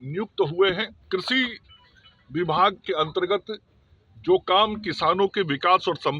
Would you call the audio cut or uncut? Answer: cut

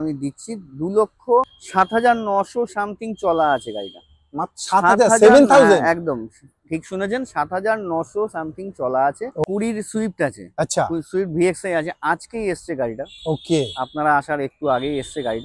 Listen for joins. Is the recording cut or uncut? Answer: cut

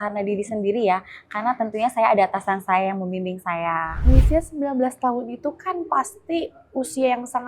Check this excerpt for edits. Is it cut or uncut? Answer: cut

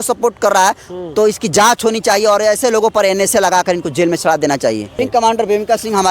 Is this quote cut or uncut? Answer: cut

